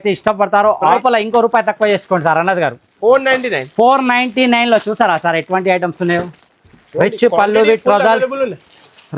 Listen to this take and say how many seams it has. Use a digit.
1